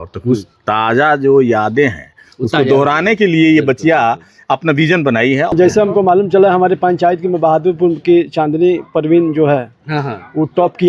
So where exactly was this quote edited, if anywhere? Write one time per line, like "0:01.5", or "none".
0:05.5